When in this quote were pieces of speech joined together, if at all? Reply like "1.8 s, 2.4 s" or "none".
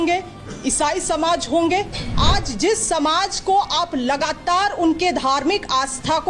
2.0 s